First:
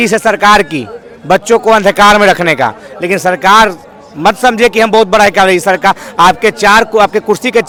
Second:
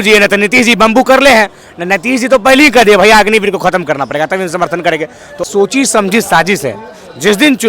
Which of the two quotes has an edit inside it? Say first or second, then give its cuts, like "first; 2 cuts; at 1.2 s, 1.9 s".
second; 1 cut; at 5.5 s